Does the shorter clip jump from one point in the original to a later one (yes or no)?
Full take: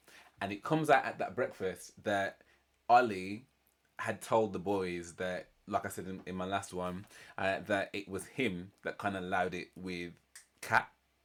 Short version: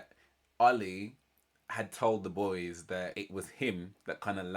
yes